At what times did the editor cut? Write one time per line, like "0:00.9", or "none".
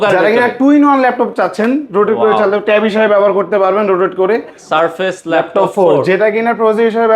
0:04.6